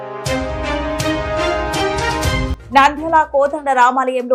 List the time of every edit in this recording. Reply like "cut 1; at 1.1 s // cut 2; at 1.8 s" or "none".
none